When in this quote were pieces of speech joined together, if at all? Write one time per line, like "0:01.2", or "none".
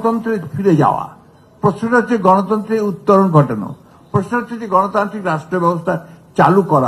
none